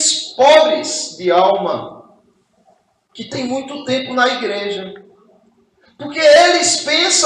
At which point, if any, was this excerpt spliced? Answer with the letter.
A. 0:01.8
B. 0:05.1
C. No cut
C